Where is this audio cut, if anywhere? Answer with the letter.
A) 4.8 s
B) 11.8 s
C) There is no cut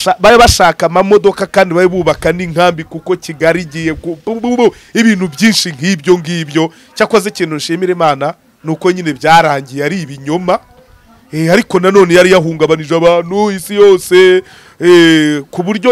C